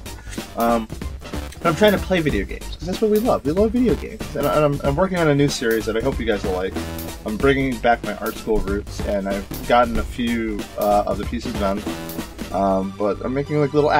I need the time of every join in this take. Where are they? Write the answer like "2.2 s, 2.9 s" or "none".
3.0 s